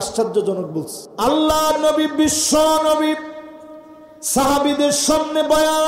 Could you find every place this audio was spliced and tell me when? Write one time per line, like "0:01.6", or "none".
0:01.0